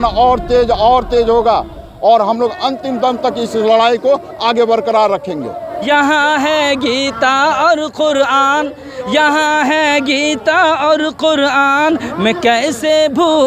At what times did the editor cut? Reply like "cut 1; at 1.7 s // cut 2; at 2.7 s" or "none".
cut 1; at 5.7 s